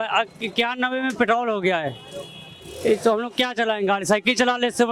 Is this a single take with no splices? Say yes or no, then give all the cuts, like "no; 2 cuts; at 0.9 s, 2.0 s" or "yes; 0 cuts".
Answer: yes; 0 cuts